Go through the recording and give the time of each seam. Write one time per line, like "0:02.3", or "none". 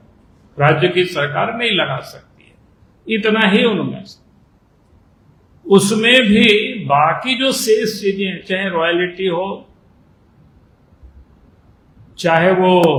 none